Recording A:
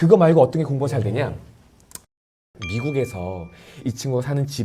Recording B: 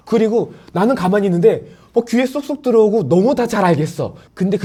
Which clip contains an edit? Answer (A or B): A